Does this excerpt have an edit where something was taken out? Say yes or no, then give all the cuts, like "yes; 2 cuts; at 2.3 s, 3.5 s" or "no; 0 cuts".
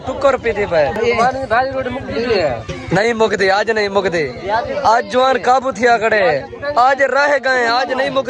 no; 0 cuts